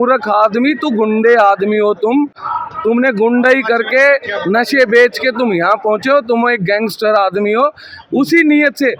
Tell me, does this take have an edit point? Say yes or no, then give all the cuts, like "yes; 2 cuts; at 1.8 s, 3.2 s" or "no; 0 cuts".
no; 0 cuts